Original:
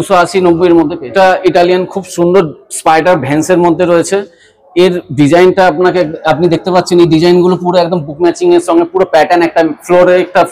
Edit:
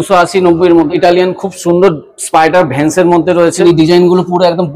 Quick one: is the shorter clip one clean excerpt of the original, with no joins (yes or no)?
no